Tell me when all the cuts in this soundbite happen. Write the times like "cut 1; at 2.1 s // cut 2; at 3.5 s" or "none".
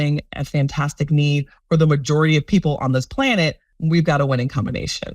cut 1; at 3.7 s